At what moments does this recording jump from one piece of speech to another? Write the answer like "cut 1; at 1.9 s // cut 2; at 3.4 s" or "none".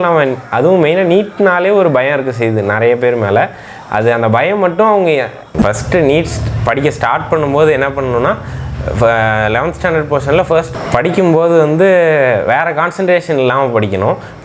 cut 1; at 5.6 s // cut 2; at 10.8 s